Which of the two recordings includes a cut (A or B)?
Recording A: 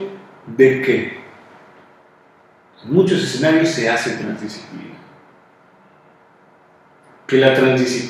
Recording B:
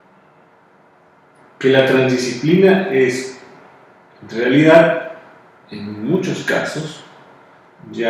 A